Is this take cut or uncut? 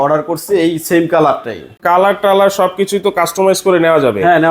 cut